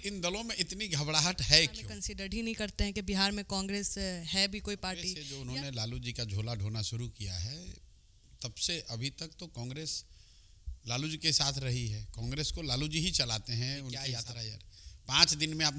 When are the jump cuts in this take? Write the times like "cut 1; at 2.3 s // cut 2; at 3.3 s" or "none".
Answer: cut 1; at 2.0 s // cut 2; at 5.2 s // cut 3; at 14.1 s

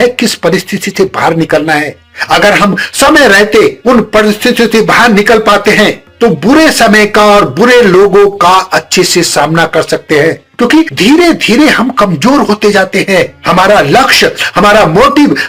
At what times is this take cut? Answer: none

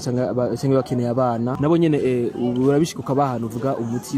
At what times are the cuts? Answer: cut 1; at 1.5 s

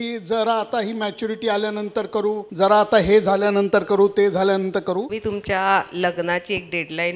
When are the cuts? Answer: cut 1; at 2.5 s // cut 2; at 5.2 s

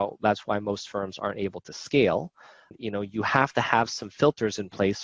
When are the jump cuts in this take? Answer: cut 1; at 2.7 s

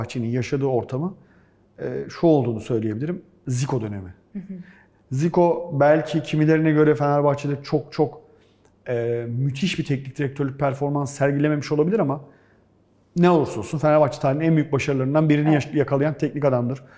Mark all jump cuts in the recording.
none

